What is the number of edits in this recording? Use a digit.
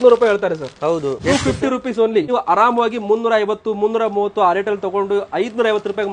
2